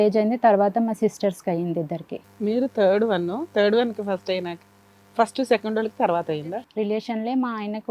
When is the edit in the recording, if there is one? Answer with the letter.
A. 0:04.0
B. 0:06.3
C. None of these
B